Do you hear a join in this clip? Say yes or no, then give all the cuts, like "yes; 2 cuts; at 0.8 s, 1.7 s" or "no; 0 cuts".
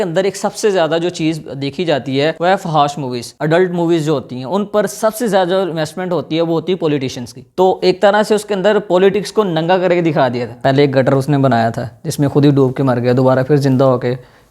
yes; 3 cuts; at 2.4 s, 7.5 s, 10.5 s